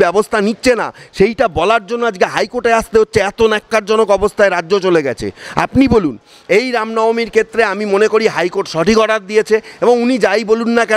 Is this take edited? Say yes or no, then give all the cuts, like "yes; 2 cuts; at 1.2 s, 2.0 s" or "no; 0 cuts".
no; 0 cuts